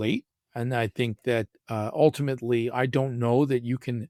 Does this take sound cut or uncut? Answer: uncut